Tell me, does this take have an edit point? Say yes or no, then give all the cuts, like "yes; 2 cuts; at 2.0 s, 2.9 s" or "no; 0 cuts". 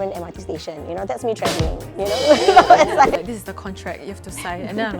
yes; 1 cut; at 3.2 s